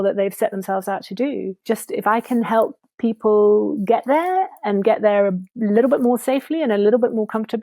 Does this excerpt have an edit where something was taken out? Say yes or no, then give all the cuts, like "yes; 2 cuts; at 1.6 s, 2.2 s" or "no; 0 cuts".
no; 0 cuts